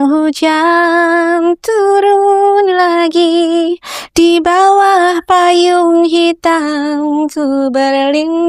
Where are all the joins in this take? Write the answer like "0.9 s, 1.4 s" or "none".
none